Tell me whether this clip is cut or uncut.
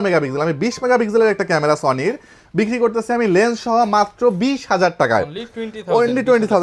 uncut